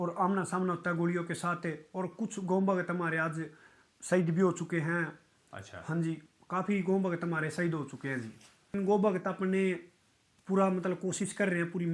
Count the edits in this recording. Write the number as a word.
one